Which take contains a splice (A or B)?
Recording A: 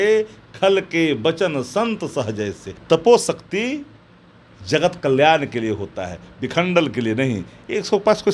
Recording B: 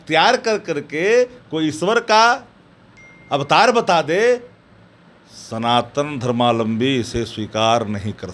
A